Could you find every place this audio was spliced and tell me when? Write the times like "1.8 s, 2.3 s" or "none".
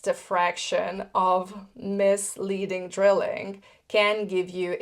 none